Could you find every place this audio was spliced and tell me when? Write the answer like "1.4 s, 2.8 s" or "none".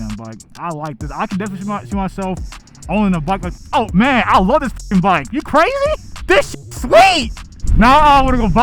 3.5 s, 7.6 s